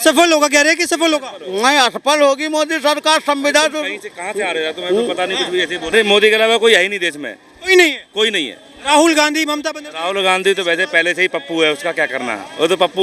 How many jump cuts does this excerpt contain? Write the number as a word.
one